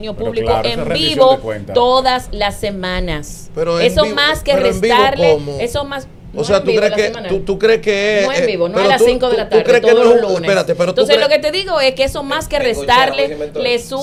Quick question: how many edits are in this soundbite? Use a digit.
0